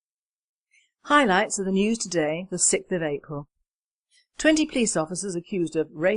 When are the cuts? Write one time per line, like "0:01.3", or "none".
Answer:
0:04.0